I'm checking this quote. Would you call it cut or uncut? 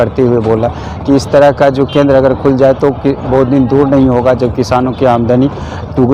uncut